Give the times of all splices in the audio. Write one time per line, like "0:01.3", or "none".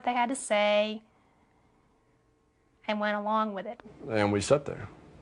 none